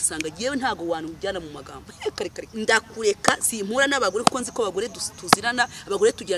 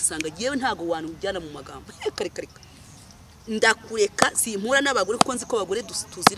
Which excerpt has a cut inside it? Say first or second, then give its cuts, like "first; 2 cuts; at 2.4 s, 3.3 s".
first; 1 cut; at 2.4 s